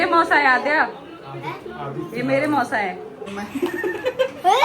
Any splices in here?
yes; 1 cut; at 3.3 s

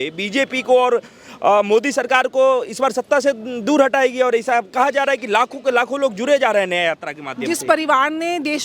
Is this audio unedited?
yes; 0 cuts

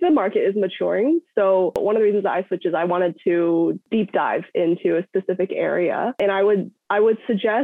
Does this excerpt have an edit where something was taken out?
no; 0 cuts

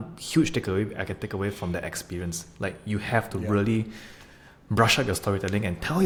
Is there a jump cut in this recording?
no; 0 cuts

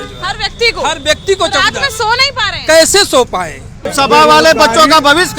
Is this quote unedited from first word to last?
no; 1 cut; at 3.9 s

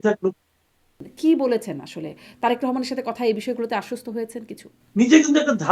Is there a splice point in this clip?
yes; 2 cuts; at 1.0 s, 4.8 s

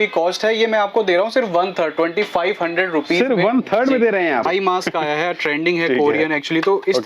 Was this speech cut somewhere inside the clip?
yes; 1 cut; at 4.5 s

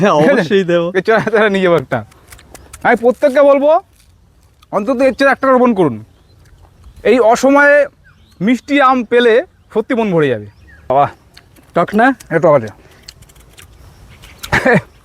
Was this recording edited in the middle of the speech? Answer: yes; 1 cut; at 10.9 s

